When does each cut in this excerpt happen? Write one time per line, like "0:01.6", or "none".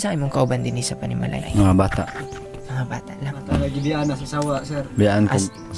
0:01.4
0:03.5